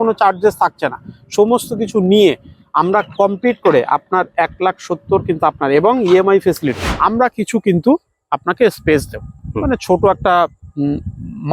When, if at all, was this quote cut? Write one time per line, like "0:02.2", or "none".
0:06.9